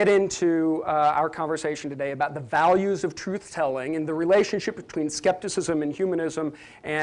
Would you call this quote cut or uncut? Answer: uncut